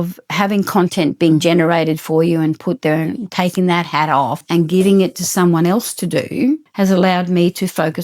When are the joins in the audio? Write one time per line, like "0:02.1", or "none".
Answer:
0:04.4
0:06.7